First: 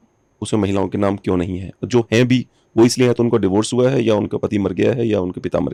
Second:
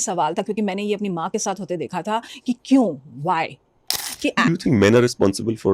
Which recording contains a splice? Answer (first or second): second